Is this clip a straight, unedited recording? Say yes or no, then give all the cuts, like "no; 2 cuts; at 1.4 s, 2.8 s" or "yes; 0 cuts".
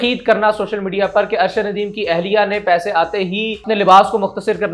no; 1 cut; at 3.6 s